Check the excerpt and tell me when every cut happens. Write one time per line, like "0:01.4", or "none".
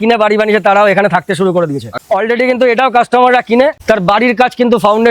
0:02.0